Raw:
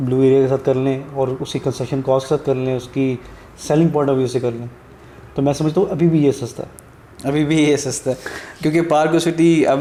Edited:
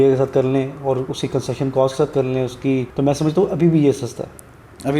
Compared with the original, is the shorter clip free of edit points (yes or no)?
no